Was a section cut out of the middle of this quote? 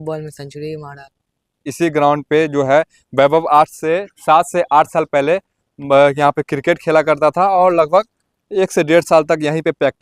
yes; 1 cut; at 1.7 s

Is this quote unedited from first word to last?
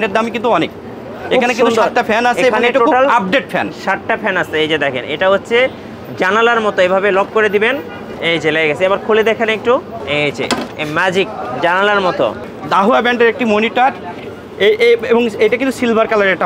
no; 3 cuts; at 8.2 s, 10.0 s, 12.5 s

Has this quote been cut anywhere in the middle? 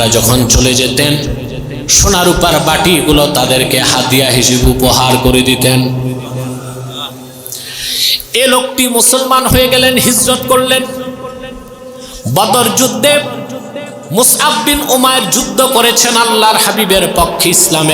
no; 0 cuts

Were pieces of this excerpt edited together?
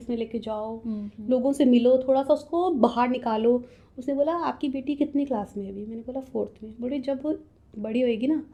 no; 0 cuts

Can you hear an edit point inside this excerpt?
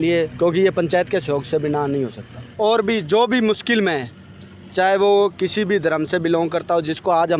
yes; 1 cut; at 2.5 s

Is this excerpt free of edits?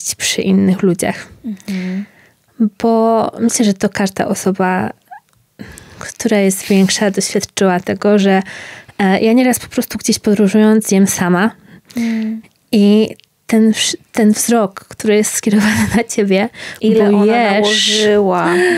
yes; 0 cuts

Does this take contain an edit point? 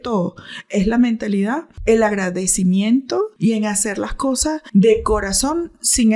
yes; 3 cuts; at 1.7 s, 3.3 s, 4.6 s

